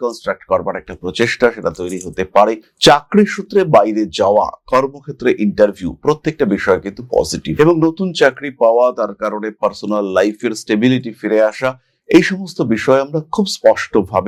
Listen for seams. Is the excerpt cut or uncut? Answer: uncut